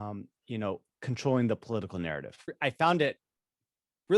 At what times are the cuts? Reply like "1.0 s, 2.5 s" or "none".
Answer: 2.5 s